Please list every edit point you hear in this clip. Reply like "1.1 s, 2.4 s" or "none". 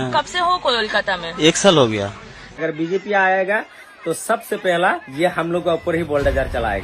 2.6 s